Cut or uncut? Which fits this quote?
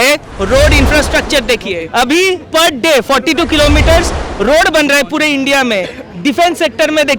cut